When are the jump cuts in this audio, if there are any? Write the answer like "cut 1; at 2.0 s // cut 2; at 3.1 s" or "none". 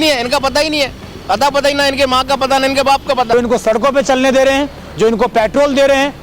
cut 1; at 3.3 s